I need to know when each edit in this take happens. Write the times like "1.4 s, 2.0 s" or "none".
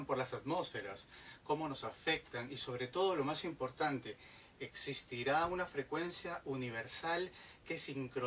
3.7 s